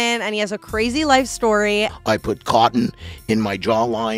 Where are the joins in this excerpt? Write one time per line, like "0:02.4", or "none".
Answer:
0:01.9

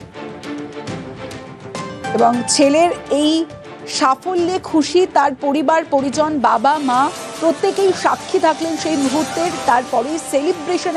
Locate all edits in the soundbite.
none

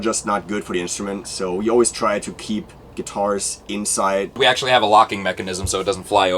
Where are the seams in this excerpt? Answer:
0:01.3
0:04.3

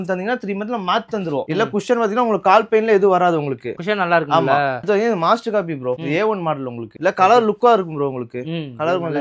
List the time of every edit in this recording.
0:01.5
0:04.8
0:07.0

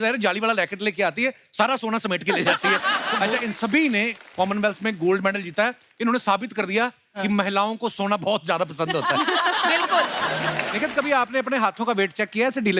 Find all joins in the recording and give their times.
0:03.2
0:10.6

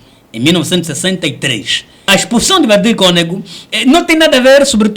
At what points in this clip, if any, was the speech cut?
0:02.0

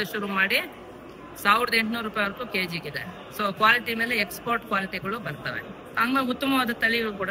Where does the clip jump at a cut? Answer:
none

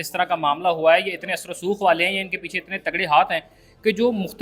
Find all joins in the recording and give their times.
none

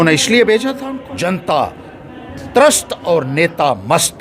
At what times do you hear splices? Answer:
0:01.1

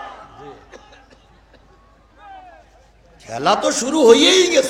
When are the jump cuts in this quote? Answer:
0:02.1

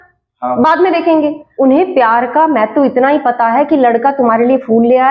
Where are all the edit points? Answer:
0:01.4

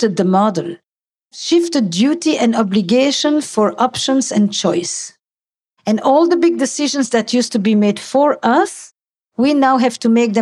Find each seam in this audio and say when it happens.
0:01.4

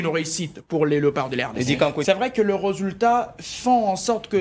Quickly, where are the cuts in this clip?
0:02.0

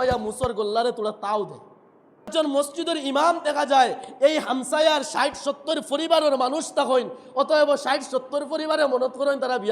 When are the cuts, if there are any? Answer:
0:02.3

